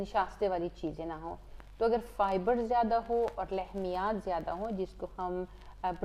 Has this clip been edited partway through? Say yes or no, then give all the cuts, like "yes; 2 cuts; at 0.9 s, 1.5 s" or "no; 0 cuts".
no; 0 cuts